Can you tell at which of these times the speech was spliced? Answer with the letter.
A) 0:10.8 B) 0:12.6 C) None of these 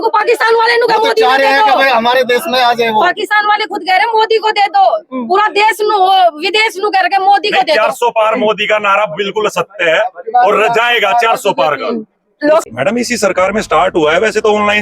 B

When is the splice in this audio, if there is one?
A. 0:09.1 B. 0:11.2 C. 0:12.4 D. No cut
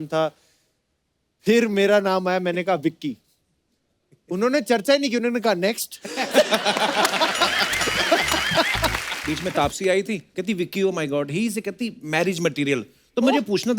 A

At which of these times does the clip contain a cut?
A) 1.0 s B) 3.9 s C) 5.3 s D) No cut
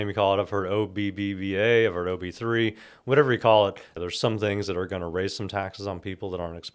B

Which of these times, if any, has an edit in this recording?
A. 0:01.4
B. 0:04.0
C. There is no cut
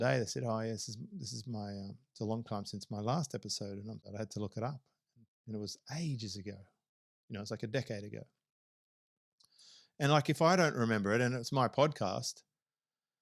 B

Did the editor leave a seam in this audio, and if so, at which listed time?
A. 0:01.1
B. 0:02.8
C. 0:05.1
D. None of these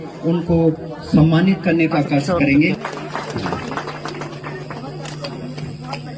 B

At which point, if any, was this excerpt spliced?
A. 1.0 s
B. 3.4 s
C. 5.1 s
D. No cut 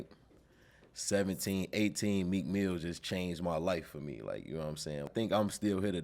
C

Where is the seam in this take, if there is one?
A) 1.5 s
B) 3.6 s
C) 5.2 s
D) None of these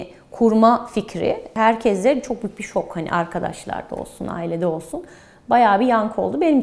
A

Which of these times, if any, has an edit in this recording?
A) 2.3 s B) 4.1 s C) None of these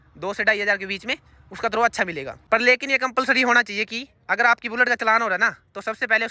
A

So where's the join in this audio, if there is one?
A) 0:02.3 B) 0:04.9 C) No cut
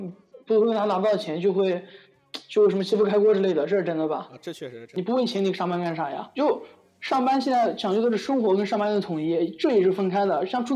B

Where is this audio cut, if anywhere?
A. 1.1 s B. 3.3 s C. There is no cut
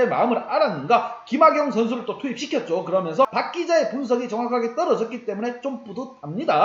B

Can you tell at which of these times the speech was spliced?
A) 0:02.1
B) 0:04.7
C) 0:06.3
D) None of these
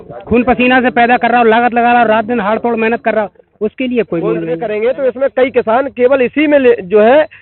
B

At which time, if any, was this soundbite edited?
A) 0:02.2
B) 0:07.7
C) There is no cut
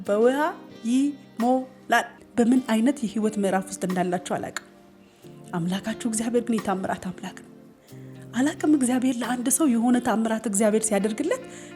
A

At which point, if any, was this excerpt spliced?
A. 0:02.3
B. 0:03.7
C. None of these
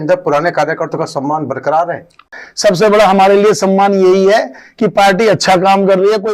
A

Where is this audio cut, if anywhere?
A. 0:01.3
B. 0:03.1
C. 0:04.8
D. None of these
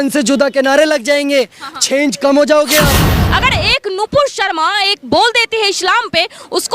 B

